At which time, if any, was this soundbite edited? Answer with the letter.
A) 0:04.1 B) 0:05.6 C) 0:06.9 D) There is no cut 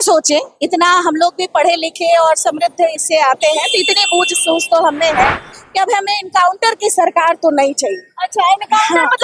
B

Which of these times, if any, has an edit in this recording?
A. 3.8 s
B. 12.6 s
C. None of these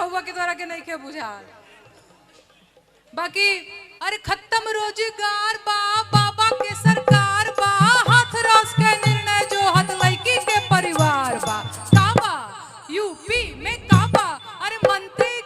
A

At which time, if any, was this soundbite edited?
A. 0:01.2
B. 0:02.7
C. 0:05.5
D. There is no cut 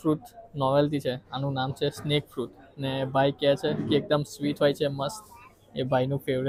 D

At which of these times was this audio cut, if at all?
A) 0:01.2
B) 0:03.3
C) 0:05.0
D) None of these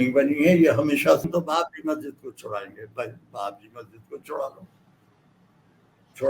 A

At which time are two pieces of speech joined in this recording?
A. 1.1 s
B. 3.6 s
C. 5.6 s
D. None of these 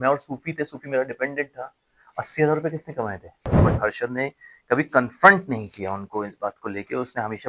B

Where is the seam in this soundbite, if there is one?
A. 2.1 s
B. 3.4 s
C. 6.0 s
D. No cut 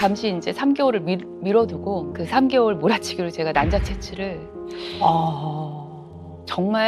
A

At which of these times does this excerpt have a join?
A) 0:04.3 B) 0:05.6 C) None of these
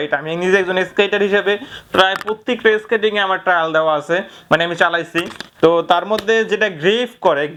C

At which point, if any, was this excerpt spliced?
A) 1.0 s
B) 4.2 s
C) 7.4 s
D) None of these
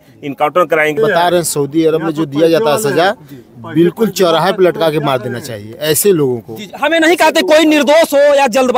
A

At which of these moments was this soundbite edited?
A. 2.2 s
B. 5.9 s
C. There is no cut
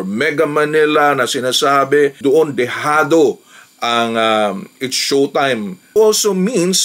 B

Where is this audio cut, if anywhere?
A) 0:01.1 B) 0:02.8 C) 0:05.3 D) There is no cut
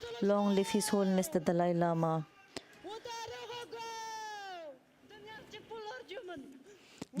C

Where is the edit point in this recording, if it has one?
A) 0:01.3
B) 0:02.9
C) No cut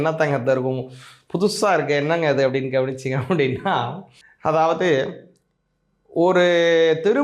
C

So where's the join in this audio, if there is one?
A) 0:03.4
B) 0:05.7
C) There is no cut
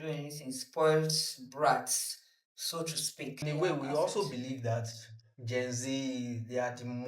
A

